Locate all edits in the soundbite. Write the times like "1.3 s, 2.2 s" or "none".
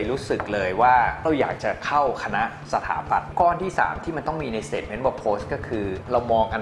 3.3 s